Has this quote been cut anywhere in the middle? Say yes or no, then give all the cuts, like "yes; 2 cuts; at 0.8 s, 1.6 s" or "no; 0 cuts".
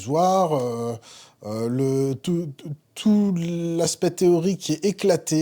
no; 0 cuts